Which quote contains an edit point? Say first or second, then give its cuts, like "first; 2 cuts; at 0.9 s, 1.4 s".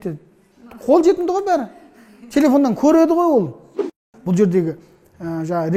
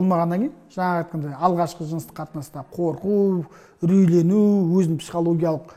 first; 1 cut; at 4.1 s